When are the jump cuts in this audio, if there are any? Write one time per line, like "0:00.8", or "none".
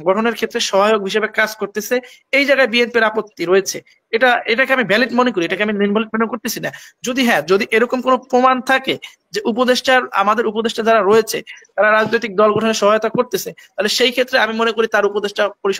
none